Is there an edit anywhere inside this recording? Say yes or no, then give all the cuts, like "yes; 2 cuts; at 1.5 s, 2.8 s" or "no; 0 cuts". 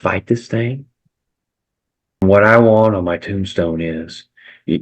yes; 1 cut; at 2.2 s